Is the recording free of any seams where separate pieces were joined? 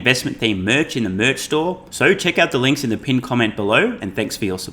no; 1 cut; at 1.9 s

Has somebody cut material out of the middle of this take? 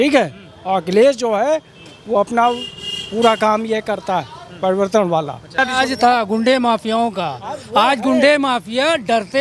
yes; 1 cut; at 5.4 s

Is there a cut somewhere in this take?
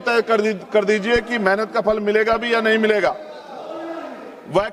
no; 0 cuts

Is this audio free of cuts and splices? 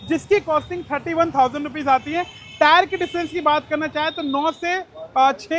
yes; 0 cuts

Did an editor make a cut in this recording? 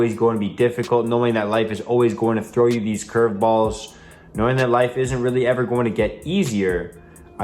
no; 0 cuts

